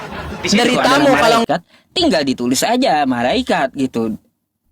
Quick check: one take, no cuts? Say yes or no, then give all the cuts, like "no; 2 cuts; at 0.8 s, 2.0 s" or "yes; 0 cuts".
no; 1 cut; at 1.4 s